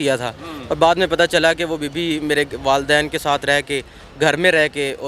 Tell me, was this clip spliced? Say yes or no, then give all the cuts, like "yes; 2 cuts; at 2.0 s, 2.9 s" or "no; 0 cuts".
no; 0 cuts